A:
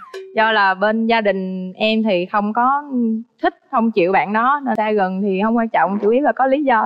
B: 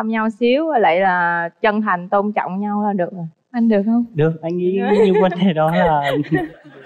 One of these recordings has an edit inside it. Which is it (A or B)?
A